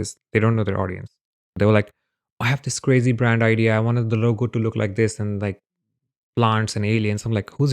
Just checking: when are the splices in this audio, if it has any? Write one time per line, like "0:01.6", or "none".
0:01.5